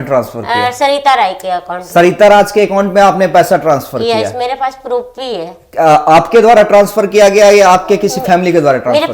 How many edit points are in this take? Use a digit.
0